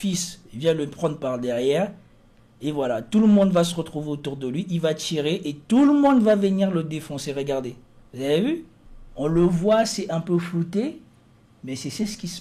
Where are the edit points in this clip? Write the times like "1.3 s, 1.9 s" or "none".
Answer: none